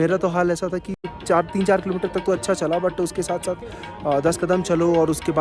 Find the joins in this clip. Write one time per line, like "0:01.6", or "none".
0:01.2